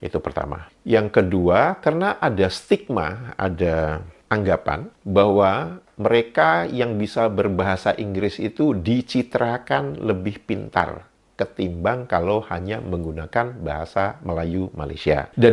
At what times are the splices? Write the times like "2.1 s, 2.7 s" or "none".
none